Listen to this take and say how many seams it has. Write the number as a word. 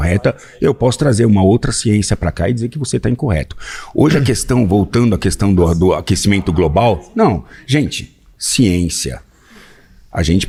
zero